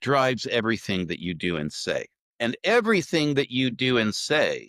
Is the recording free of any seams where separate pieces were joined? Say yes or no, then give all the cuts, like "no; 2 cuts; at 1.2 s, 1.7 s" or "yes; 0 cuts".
no; 1 cut; at 2.2 s